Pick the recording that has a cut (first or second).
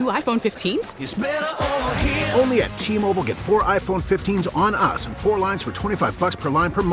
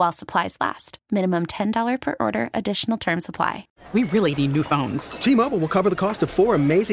second